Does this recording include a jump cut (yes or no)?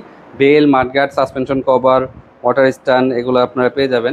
no